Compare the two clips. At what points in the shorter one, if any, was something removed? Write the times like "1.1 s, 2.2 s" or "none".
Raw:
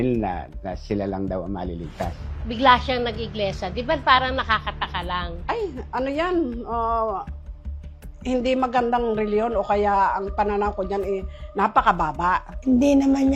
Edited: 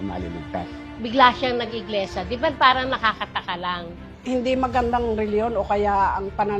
3.9 s